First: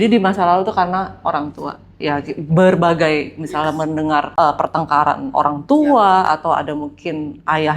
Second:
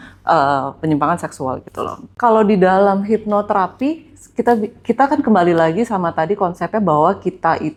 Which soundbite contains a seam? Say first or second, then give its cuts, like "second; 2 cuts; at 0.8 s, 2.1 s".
first; 1 cut; at 4.3 s